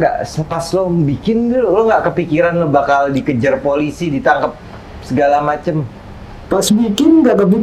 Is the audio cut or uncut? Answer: uncut